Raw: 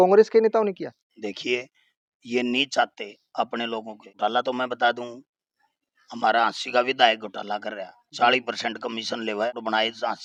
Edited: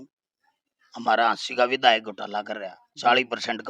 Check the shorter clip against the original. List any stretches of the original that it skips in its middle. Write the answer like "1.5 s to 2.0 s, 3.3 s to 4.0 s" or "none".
none